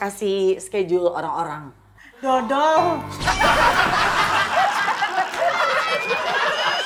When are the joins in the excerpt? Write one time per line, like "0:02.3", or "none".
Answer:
none